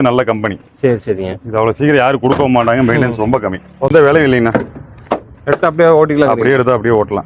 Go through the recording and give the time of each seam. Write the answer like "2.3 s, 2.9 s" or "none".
3.9 s